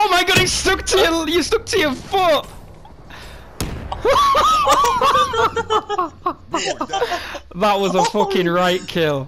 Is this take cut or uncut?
uncut